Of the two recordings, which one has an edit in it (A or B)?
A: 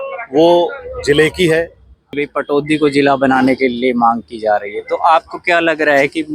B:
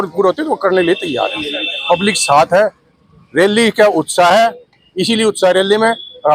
A